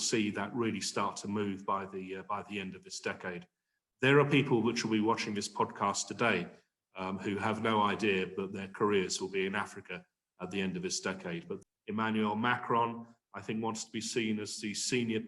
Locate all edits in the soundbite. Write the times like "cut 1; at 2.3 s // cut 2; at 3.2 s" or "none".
cut 1; at 11.5 s